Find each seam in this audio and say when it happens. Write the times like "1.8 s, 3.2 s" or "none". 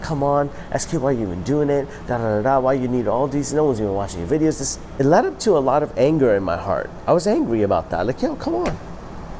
4.8 s